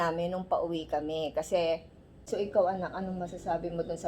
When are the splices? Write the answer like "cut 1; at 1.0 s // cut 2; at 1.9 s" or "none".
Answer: cut 1; at 2.2 s